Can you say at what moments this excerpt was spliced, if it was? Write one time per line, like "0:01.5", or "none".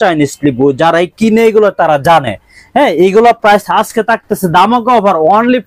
none

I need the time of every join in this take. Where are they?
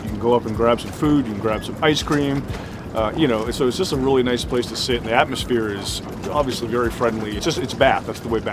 0:07.4

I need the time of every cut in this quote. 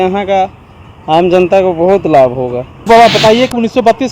0:02.7

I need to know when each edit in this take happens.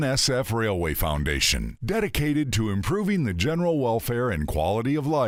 none

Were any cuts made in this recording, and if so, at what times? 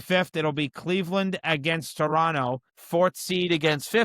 0:02.7

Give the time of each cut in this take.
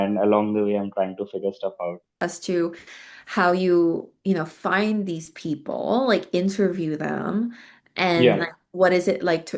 0:02.1

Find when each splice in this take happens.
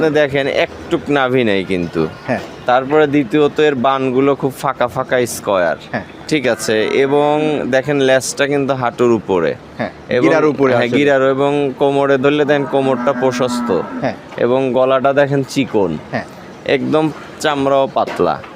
none

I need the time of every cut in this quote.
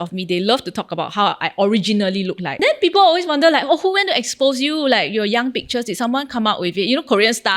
0:02.5

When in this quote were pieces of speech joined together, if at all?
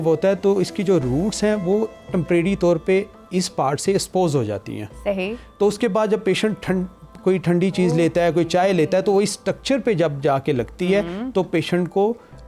none

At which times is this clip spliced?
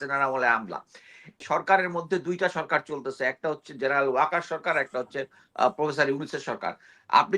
0:01.4

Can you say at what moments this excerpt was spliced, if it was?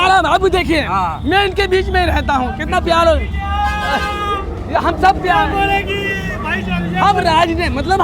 none

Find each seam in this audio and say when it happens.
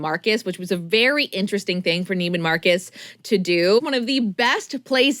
0:03.8

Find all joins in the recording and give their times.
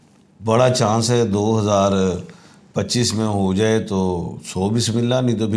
none

